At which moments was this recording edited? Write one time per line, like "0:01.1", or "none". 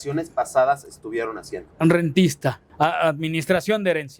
0:02.6